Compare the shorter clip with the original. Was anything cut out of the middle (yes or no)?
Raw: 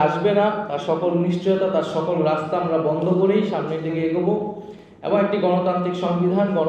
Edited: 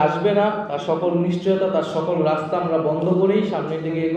no